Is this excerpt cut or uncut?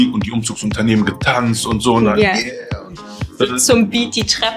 uncut